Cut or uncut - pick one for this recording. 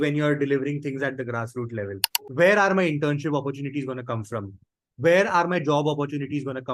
cut